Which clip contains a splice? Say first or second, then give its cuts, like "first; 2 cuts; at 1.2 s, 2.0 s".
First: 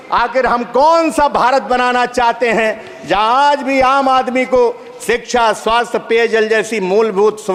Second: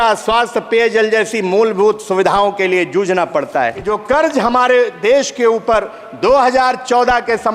second; 1 cut; at 3.9 s